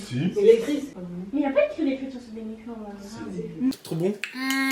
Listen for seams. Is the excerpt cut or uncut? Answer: cut